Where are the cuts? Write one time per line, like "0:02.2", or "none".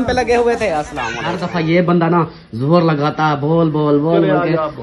0:01.3